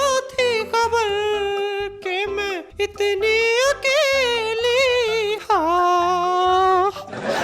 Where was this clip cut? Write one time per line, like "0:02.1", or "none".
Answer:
0:02.6
0:05.4